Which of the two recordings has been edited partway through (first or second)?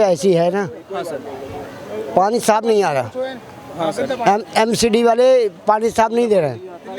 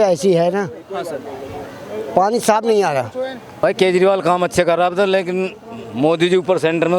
second